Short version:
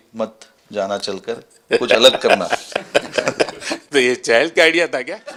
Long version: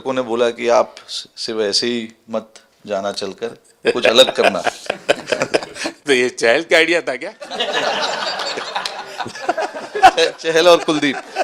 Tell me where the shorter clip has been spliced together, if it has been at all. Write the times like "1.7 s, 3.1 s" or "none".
none